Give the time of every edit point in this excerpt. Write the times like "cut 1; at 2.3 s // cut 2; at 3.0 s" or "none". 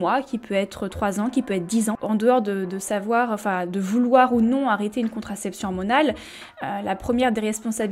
cut 1; at 2.0 s